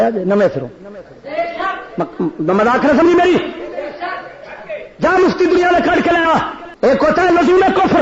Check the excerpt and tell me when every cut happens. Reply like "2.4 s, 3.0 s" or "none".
6.6 s